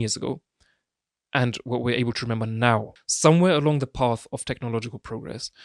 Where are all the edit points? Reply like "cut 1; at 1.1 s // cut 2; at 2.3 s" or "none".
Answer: cut 1; at 3.0 s